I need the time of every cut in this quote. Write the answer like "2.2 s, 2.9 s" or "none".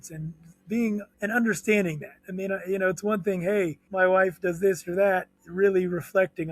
1.1 s, 3.8 s, 5.4 s